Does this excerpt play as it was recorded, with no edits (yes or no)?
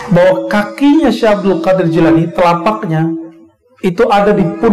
yes